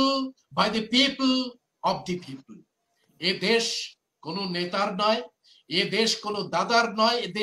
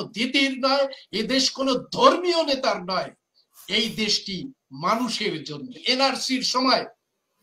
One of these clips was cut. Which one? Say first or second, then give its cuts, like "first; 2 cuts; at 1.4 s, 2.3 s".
second; 1 cut; at 5.8 s